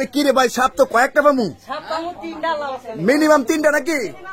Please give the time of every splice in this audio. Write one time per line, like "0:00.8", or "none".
none